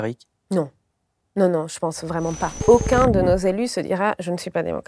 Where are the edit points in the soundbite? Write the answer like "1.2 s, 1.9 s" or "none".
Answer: 2.6 s